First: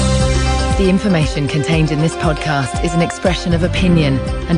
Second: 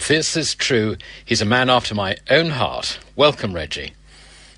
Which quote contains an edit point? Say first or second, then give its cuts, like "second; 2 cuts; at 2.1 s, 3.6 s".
second; 1 cut; at 2.2 s